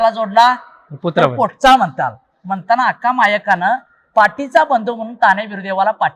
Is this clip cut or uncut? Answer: uncut